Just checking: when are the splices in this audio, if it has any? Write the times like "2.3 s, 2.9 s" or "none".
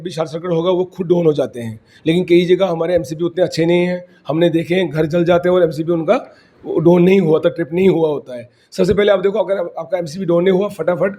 none